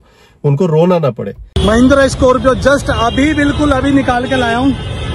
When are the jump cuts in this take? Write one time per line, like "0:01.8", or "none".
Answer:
0:01.4